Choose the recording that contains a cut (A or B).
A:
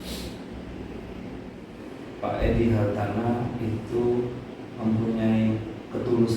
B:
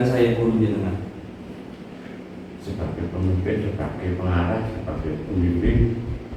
A